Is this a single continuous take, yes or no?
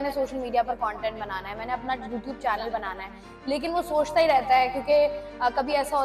yes